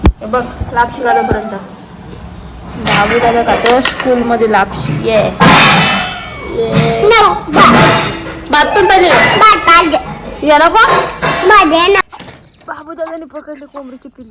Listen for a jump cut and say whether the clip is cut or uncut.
cut